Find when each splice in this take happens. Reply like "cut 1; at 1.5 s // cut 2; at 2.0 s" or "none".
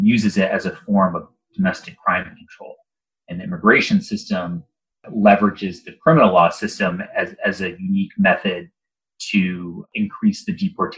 cut 1; at 9.8 s

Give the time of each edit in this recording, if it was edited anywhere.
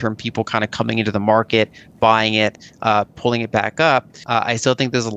cut 1; at 4.2 s

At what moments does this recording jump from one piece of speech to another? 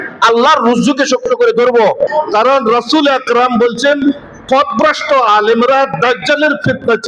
cut 1; at 2.1 s

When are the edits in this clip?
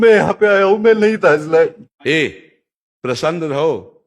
cut 1; at 1.9 s

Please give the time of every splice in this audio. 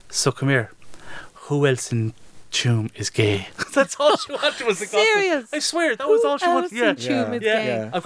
none

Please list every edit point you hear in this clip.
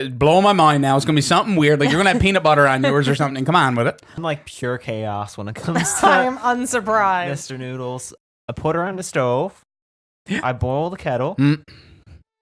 cut 1; at 4.2 s // cut 2; at 8.1 s

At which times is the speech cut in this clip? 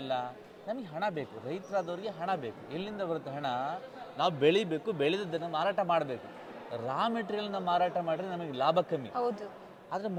none

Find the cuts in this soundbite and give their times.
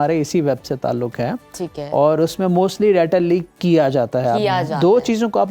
none

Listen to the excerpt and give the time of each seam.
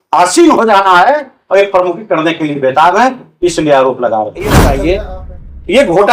cut 1; at 4.6 s

